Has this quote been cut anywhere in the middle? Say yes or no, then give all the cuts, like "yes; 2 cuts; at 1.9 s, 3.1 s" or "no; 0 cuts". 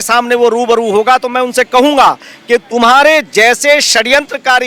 no; 0 cuts